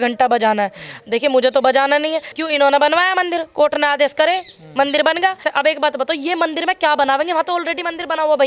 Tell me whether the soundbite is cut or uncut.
cut